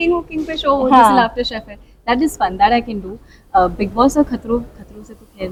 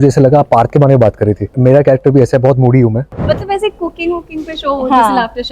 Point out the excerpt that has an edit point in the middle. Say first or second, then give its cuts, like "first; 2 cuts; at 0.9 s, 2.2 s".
second; 2 cuts; at 1.6 s, 3.1 s